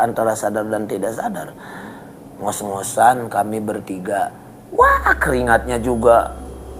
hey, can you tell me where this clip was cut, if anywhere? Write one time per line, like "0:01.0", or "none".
0:04.4